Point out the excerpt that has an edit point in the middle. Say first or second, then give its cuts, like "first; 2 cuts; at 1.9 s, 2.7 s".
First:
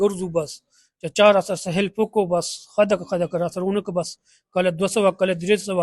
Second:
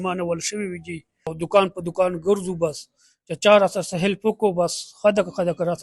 second; 1 cut; at 1.3 s